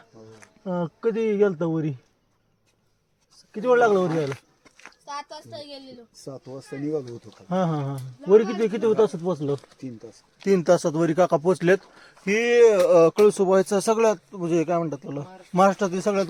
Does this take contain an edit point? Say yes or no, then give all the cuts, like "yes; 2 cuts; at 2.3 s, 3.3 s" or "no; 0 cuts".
no; 0 cuts